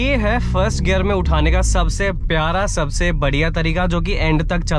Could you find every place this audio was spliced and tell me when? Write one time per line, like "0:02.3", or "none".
none